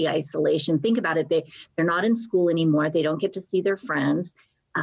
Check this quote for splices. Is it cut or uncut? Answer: uncut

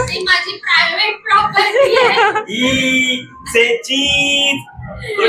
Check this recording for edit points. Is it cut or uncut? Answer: uncut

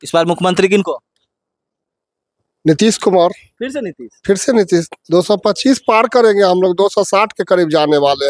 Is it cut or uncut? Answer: uncut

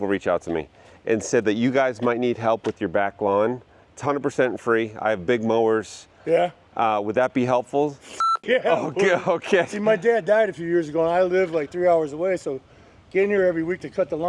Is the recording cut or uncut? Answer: uncut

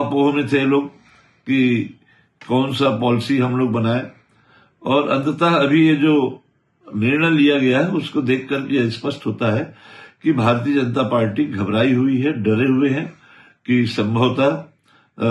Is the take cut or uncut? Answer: uncut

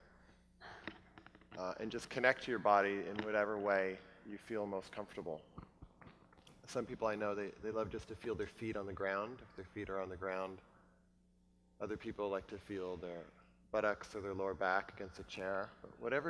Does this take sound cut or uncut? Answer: cut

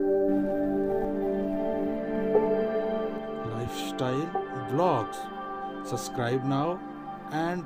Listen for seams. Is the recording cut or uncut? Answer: uncut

